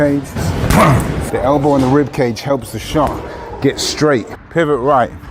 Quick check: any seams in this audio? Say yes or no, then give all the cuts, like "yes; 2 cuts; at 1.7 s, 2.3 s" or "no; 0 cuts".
yes; 1 cut; at 4.4 s